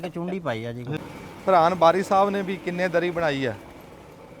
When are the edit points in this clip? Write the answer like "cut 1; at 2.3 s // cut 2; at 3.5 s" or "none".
cut 1; at 1.1 s

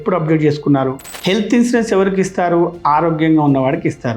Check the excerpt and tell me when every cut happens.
cut 1; at 1.1 s

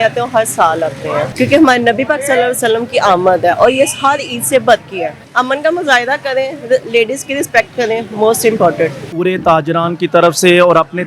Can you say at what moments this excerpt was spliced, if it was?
cut 1; at 1.3 s // cut 2; at 5.2 s // cut 3; at 9.1 s

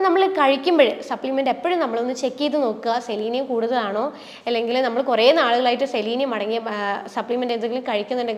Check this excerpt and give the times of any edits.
none

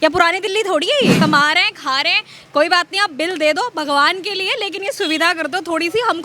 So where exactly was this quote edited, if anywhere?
cut 1; at 1.2 s

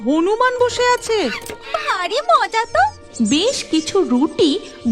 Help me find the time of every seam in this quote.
cut 1; at 3.0 s

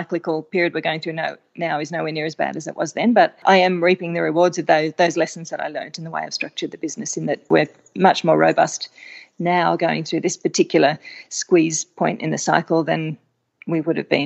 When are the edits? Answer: cut 1; at 3.4 s // cut 2; at 7.5 s

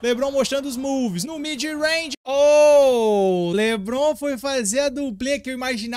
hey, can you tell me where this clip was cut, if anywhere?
cut 1; at 2.1 s // cut 2; at 3.5 s

